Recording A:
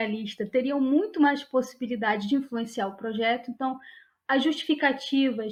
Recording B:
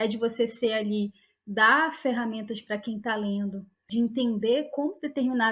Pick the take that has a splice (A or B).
B